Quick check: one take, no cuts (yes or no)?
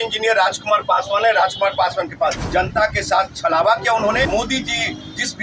no